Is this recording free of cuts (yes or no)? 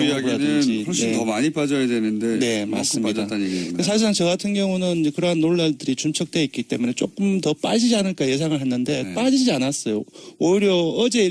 yes